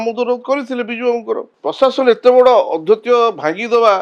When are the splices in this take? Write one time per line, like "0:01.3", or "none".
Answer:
0:01.5